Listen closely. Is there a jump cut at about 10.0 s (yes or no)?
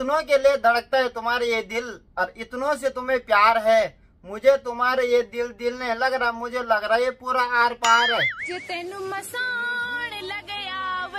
no